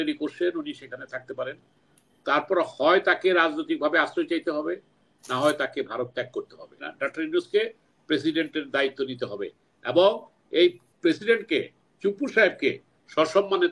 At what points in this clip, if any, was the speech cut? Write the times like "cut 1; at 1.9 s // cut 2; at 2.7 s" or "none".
cut 1; at 6.9 s